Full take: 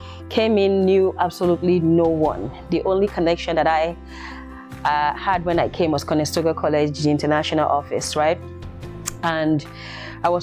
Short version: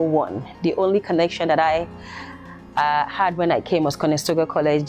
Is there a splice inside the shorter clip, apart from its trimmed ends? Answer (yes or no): no